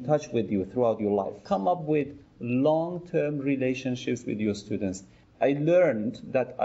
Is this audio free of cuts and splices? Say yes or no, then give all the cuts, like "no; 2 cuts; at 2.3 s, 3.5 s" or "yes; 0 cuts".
no; 2 cuts; at 1.4 s, 5.1 s